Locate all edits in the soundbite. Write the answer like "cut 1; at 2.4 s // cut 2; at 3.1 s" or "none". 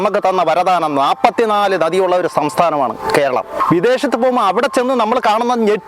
cut 1; at 3.6 s

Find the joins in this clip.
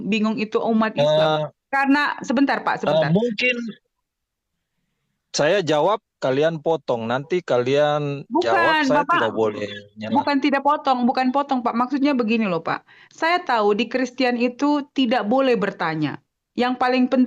none

